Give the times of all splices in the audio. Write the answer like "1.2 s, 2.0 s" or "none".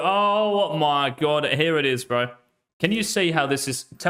none